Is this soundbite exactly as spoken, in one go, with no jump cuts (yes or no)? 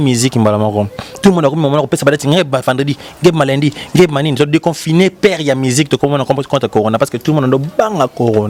yes